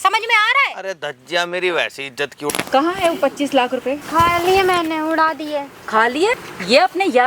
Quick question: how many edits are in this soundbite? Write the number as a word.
three